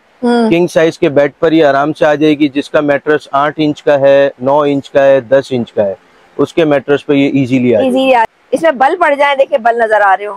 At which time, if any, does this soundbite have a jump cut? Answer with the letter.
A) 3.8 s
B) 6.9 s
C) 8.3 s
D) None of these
C